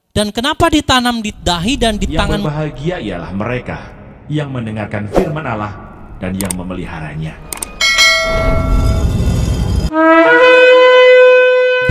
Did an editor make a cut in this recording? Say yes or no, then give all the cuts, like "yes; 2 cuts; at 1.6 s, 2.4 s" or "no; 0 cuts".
yes; 1 cut; at 2.4 s